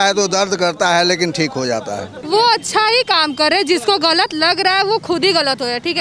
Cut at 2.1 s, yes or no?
yes